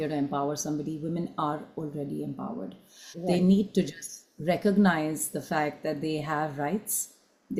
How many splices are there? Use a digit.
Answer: 0